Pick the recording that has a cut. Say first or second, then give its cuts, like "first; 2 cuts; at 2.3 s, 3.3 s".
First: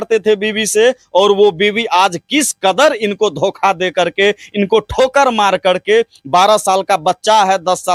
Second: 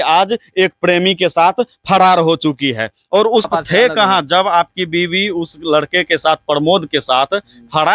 second; 1 cut; at 3.5 s